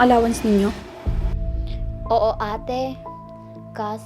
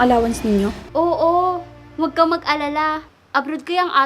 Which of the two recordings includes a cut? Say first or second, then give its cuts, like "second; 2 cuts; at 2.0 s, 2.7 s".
second; 2 cuts; at 0.8 s, 3.1 s